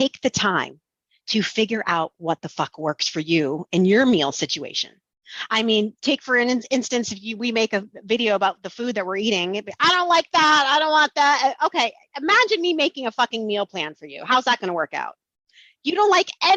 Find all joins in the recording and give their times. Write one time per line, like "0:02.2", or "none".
none